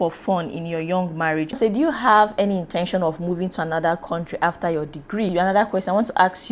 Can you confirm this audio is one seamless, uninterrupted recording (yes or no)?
no